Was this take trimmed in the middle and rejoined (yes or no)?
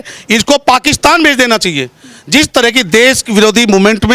no